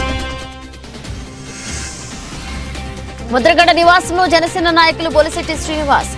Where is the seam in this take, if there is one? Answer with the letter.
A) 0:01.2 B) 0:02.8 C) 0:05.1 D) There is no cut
D